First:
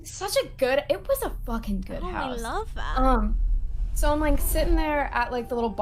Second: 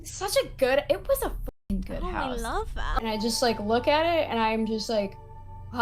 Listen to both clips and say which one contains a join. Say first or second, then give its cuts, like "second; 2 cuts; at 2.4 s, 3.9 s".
second; 1 cut; at 3.0 s